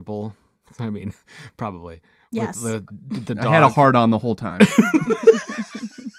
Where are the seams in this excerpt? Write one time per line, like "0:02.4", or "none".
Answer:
none